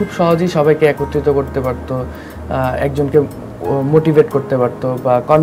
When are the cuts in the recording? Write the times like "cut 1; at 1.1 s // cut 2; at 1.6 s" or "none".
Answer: none

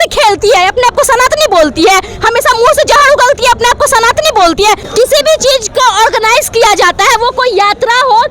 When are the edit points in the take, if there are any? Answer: cut 1; at 4.8 s

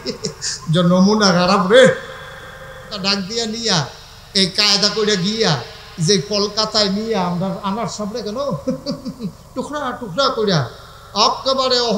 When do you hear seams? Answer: cut 1; at 2.9 s

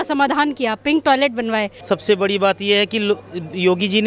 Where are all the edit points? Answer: cut 1; at 1.7 s

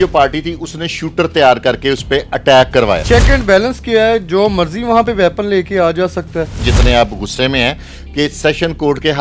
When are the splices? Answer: cut 1; at 3.0 s // cut 2; at 6.6 s

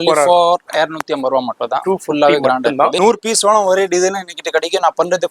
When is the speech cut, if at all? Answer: cut 1; at 3.0 s

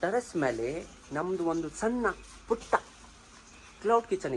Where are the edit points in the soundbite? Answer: none

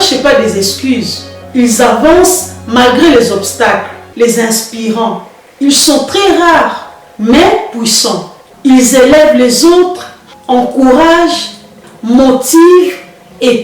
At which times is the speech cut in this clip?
cut 1; at 4.1 s // cut 2; at 8.4 s

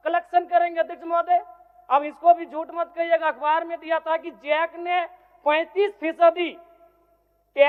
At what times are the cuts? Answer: none

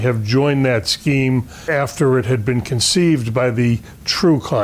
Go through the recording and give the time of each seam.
cut 1; at 1.5 s

